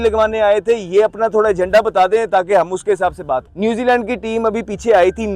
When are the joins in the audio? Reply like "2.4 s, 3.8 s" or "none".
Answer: 3.5 s